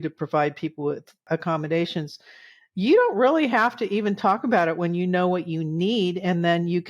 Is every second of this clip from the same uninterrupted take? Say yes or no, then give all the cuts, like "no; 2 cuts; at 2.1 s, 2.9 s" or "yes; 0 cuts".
no; 1 cut; at 1.2 s